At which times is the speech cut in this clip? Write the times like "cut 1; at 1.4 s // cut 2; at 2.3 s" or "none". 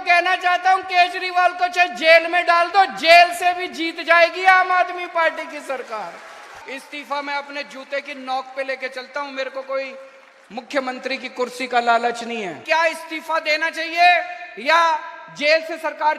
cut 1; at 6.6 s // cut 2; at 12.6 s